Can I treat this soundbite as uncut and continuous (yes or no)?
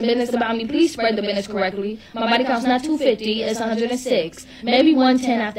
no